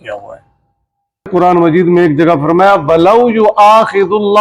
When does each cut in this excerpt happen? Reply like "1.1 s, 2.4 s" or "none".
1.3 s